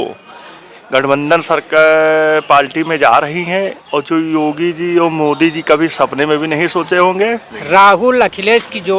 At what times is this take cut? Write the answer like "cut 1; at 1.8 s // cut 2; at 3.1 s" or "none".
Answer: cut 1; at 7.5 s